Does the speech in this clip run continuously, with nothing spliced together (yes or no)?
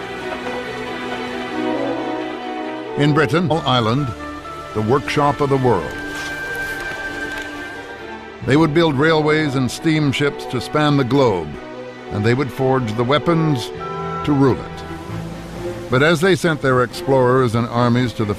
yes